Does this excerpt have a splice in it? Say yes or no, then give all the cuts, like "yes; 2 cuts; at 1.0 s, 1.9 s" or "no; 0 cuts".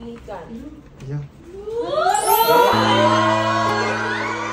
no; 0 cuts